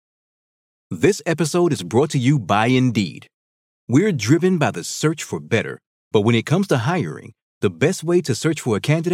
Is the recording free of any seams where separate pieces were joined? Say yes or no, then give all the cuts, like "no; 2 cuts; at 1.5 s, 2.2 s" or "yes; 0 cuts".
yes; 0 cuts